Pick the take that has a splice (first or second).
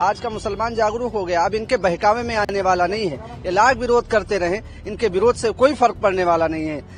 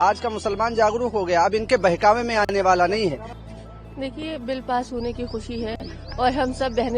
second